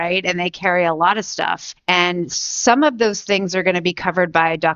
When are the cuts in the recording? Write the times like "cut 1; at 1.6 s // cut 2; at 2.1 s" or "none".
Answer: cut 1; at 1.6 s